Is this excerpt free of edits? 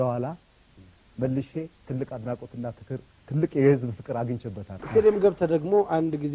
no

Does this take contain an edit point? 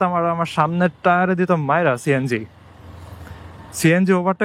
no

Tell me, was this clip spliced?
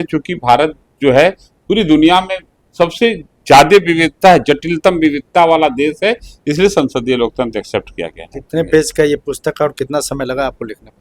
no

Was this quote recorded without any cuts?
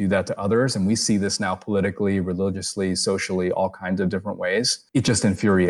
no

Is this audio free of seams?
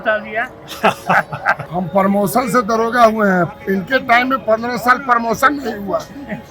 no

